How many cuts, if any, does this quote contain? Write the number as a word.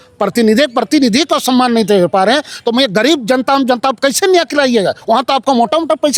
zero